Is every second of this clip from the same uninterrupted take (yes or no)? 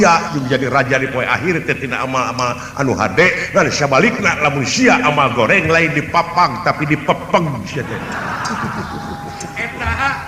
yes